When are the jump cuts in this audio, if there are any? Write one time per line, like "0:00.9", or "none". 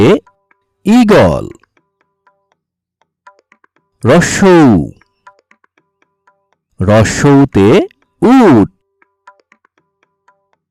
none